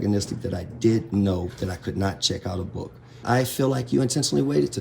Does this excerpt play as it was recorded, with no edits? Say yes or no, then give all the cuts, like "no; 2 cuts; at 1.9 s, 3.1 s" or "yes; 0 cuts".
no; 1 cut; at 3.2 s